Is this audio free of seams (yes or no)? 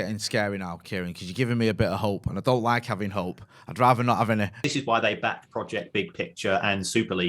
no